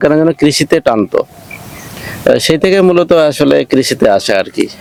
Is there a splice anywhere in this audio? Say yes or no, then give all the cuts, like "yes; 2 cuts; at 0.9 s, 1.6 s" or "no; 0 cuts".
no; 0 cuts